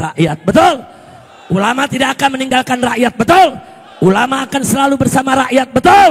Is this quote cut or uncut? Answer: uncut